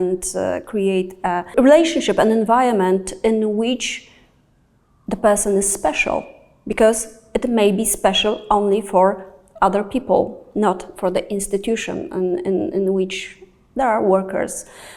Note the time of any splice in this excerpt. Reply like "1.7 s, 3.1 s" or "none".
1.5 s